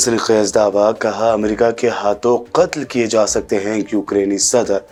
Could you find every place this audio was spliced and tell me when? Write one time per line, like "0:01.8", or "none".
none